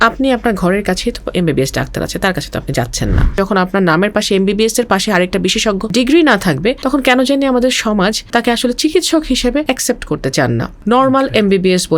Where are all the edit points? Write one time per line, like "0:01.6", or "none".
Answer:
0:03.4
0:05.9
0:06.8
0:08.2
0:09.6
0:10.7